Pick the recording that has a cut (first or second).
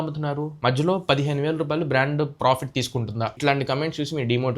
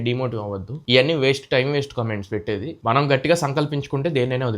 first